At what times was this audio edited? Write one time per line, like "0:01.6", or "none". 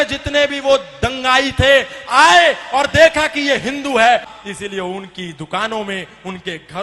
0:04.3